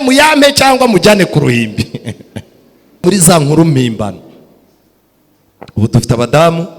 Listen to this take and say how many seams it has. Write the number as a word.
one